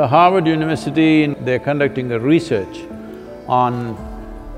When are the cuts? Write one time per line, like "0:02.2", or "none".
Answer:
0:01.3

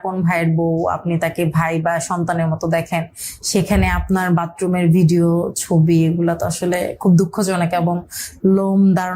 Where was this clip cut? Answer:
none

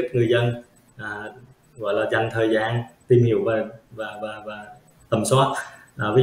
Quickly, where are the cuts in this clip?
none

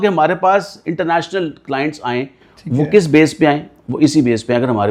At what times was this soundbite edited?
none

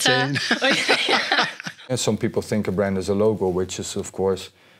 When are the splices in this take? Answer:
0:01.8

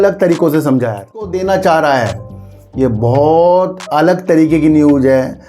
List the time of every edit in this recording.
0:01.3

